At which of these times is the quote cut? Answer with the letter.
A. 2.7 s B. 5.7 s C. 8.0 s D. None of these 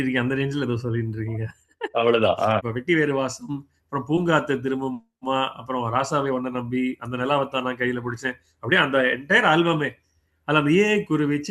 A